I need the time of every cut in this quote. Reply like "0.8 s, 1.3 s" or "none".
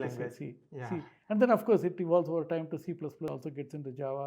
3.3 s